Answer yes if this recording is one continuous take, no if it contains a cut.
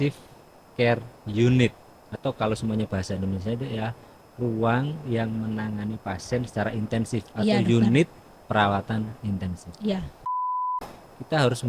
no